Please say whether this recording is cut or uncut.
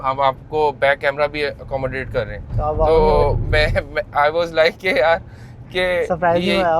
uncut